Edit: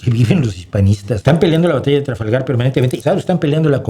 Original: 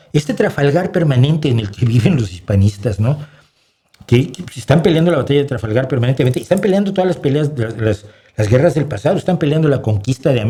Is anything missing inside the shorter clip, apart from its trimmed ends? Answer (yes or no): yes